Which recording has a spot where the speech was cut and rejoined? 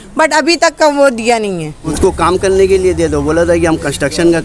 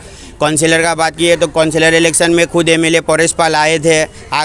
first; 1 cut; at 1.9 s

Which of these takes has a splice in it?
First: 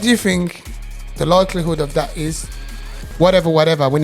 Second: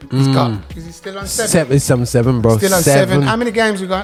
first; 1 cut; at 3.0 s

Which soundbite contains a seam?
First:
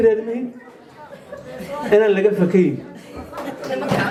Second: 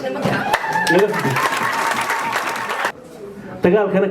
second; 1 cut; at 2.9 s

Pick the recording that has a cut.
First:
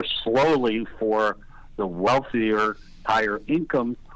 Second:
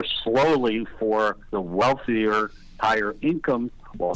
second; 1 cut; at 1.5 s

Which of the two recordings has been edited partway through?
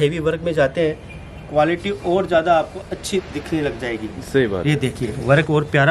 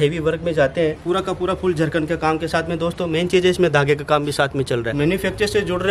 second; 2 cuts; at 1.0 s, 4.9 s

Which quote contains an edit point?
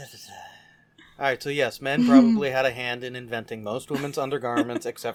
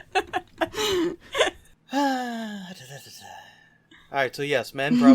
second; 1 cut; at 1.7 s

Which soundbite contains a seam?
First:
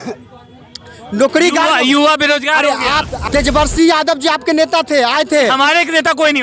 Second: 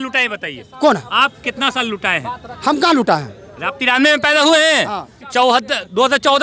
first; 1 cut; at 3.2 s

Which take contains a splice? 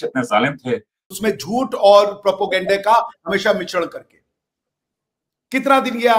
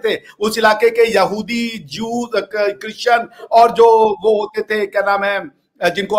first; 1 cut; at 1.0 s

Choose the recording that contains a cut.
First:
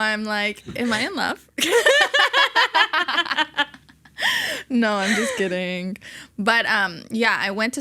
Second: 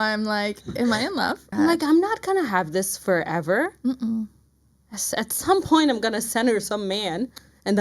second; 1 cut; at 1.4 s

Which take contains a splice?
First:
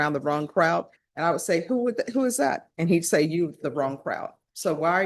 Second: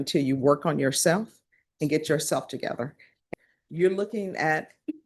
second; 1 cut; at 3.3 s

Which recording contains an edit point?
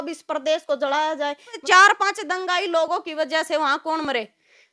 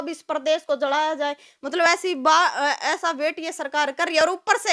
first; 1 cut; at 1.6 s

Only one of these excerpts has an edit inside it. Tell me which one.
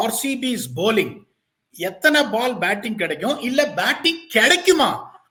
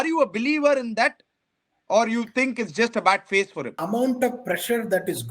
second; 1 cut; at 3.8 s

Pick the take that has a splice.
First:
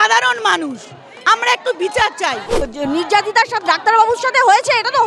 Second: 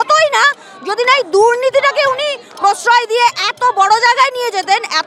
first; 1 cut; at 2.6 s

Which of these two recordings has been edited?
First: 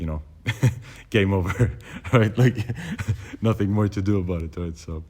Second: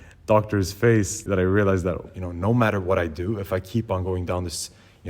second; 2 cuts; at 1.2 s, 2.1 s

